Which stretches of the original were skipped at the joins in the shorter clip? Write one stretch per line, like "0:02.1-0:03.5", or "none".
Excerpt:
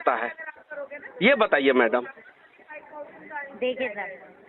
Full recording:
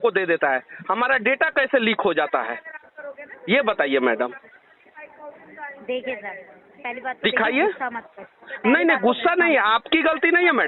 none